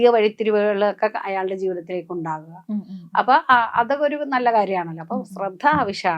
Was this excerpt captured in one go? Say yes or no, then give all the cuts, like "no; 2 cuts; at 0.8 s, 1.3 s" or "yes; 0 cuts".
yes; 0 cuts